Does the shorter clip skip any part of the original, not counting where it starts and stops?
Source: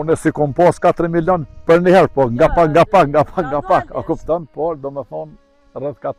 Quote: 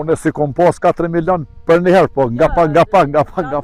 no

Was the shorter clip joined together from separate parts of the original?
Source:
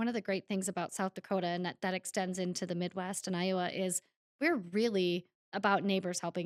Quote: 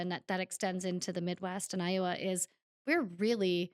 no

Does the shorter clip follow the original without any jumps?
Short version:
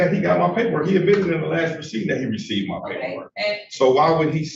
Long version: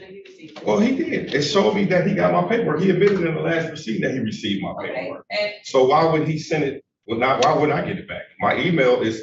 yes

